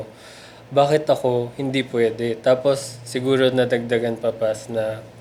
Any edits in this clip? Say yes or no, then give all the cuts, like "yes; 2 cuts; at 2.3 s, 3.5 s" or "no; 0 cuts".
no; 0 cuts